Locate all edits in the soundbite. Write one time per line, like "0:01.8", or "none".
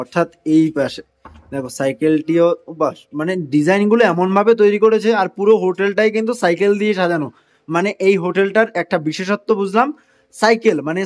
none

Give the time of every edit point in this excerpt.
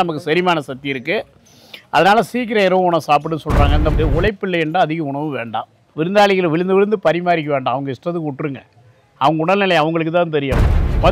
0:03.9
0:05.8

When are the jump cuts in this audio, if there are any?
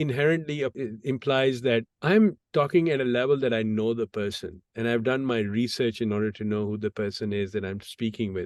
0:00.7
0:01.9
0:02.4

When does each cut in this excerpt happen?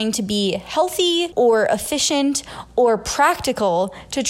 0:01.3

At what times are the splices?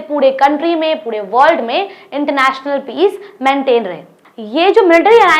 0:04.2

